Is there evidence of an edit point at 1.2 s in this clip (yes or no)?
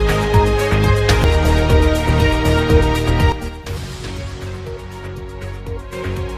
yes